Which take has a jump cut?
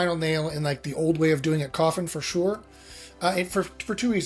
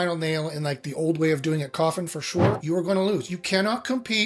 second; 1 cut; at 2.6 s

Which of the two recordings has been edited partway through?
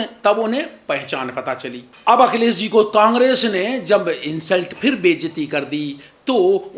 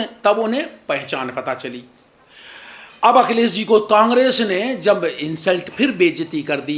first; 1 cut; at 1.9 s

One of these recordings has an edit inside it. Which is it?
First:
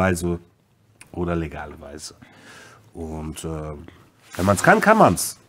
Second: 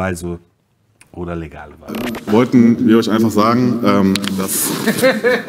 second; 1 cut; at 1.9 s

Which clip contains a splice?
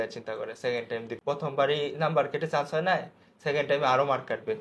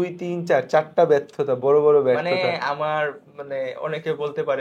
first; 1 cut; at 1.1 s

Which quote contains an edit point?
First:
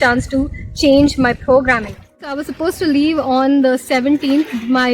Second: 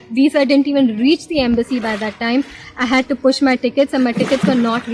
first; 1 cut; at 2.4 s

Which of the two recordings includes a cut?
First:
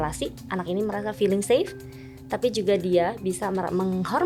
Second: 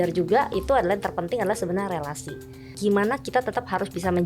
second; 1 cut; at 2.7 s

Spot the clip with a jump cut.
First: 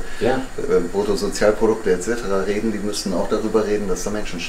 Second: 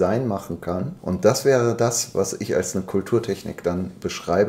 second; 1 cut; at 0.9 s

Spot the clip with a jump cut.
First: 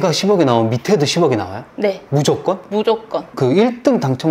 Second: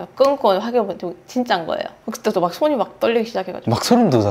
first; 1 cut; at 3.3 s

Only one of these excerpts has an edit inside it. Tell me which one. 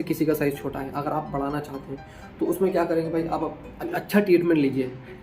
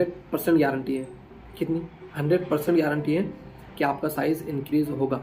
first; 1 cut; at 3.9 s

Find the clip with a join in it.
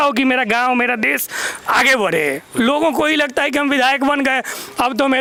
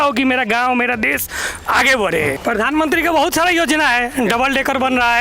second; 1 cut; at 2.4 s

